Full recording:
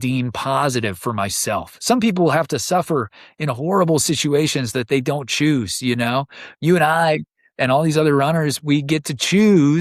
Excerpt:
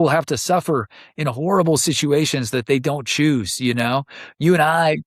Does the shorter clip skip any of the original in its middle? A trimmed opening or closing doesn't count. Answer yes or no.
no